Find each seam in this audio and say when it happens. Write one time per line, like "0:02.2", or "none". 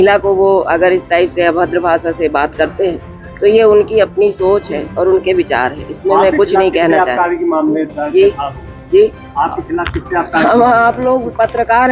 none